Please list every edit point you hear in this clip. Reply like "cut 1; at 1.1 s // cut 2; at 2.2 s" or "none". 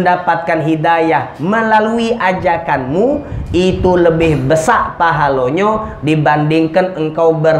none